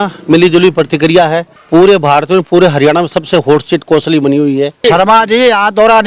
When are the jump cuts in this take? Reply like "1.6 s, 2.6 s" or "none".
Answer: 1.5 s, 4.8 s